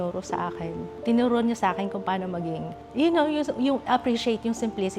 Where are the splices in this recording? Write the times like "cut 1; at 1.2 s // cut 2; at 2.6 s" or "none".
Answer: cut 1; at 1.0 s